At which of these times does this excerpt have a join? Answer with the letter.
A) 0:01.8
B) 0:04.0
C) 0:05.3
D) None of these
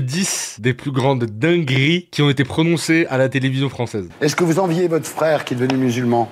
B